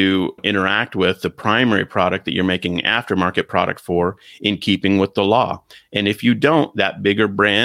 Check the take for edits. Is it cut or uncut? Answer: uncut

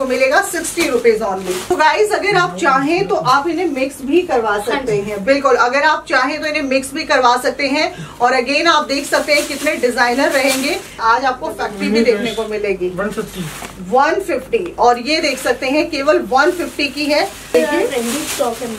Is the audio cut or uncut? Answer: cut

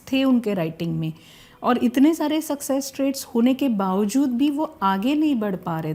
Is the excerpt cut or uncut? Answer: uncut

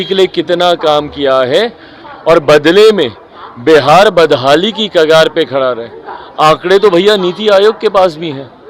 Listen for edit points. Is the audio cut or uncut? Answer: uncut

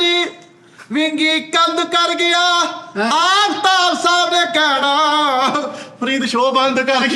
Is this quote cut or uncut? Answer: uncut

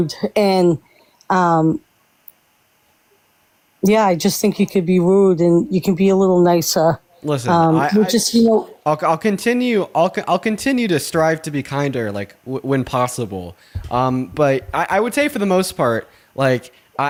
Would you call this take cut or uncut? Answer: uncut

